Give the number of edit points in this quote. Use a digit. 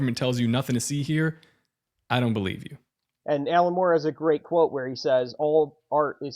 1